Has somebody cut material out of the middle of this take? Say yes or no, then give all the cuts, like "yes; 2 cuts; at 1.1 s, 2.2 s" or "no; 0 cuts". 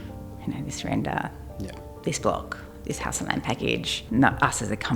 yes; 1 cut; at 4.0 s